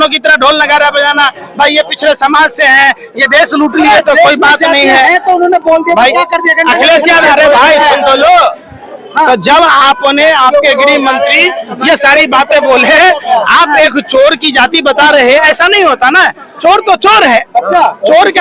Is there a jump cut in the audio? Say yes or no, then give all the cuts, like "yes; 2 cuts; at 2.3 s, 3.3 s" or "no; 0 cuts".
no; 0 cuts